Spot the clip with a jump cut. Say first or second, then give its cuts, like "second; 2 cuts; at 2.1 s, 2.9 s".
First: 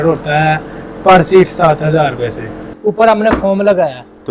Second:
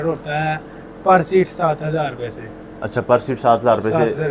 first; 1 cut; at 2.6 s